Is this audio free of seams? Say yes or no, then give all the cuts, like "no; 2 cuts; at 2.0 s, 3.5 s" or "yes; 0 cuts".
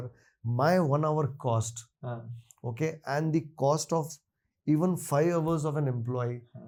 yes; 0 cuts